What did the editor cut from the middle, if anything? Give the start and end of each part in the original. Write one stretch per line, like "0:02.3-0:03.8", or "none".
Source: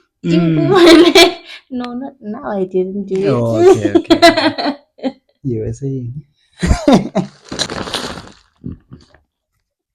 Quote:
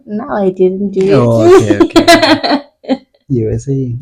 none